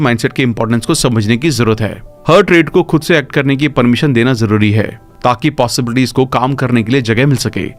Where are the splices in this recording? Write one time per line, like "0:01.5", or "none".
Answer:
none